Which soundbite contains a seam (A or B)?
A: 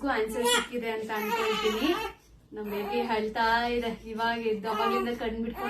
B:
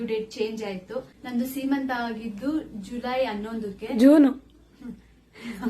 B